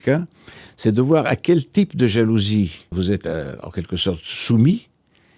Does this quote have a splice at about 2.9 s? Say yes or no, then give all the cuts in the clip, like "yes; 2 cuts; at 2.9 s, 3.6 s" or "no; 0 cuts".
yes; 1 cut; at 2.9 s